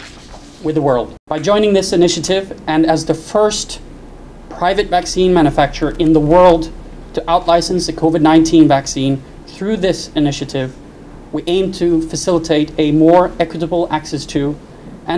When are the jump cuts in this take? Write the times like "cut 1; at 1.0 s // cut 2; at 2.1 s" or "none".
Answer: cut 1; at 1.2 s